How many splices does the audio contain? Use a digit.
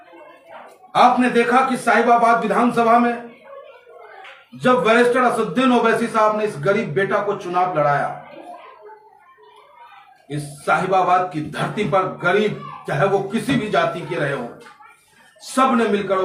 0